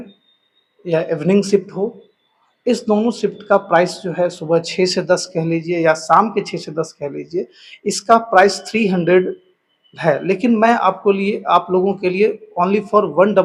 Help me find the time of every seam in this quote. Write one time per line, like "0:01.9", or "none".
none